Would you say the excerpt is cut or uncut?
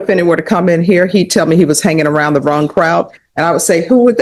uncut